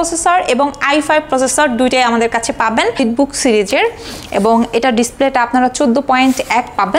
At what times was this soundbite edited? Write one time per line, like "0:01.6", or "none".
0:03.0